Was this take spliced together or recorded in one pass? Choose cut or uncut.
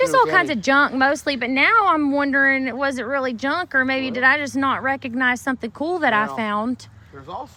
uncut